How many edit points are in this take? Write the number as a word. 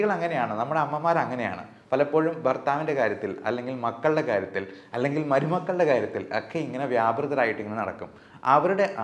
zero